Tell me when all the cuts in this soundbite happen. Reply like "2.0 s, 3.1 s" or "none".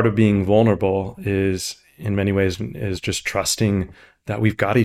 none